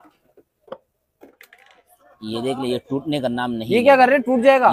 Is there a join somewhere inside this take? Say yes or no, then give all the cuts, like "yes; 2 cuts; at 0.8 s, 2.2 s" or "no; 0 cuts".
no; 0 cuts